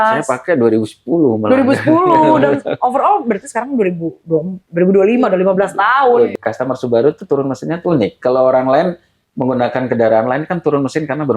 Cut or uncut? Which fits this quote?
cut